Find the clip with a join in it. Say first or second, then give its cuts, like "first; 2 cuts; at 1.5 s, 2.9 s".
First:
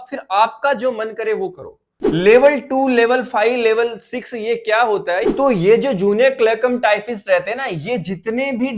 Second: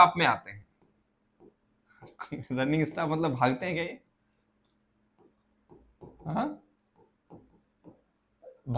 first; 2 cuts; at 1.9 s, 5.3 s